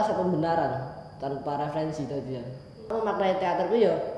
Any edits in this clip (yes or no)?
yes